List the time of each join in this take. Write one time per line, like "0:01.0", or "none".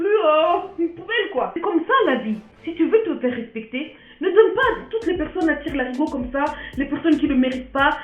0:01.5